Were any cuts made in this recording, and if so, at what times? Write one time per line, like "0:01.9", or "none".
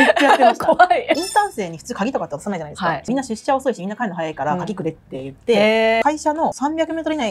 0:01.2
0:03.1
0:06.0